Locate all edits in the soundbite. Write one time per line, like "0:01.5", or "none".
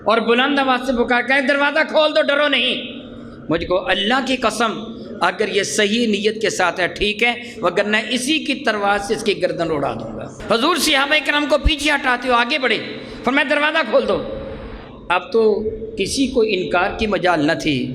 0:10.3